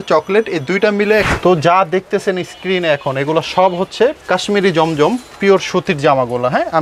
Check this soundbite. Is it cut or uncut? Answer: cut